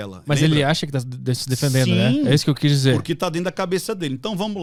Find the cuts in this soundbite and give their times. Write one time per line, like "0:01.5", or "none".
none